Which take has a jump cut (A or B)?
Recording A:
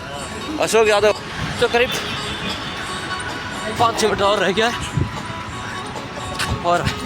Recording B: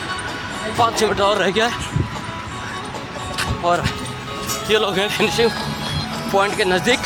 A